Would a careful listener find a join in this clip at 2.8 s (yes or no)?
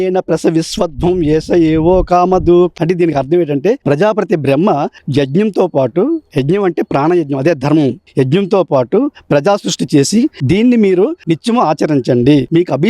no